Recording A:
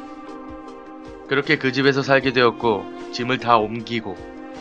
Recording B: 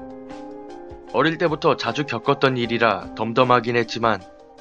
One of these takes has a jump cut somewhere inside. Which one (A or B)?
B